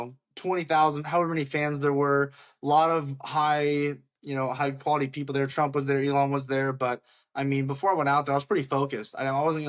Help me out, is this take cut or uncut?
uncut